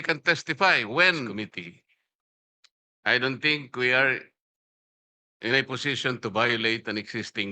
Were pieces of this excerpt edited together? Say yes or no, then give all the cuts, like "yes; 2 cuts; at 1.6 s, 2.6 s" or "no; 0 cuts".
yes; 1 cut; at 1.3 s